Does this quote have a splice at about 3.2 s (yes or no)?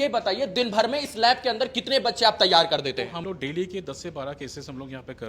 yes